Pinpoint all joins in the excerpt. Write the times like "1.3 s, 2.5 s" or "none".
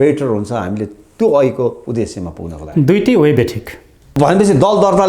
4.1 s